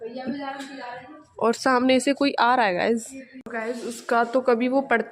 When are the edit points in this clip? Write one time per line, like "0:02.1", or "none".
0:03.5